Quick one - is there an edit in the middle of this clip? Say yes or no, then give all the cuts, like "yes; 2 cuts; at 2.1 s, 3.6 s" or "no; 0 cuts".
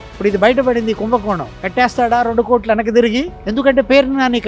no; 0 cuts